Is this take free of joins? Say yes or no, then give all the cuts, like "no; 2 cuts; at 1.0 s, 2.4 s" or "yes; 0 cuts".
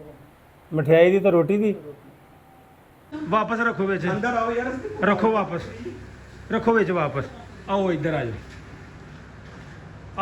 no; 1 cut; at 3.1 s